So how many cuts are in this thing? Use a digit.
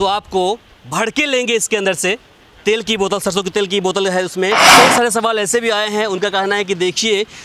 1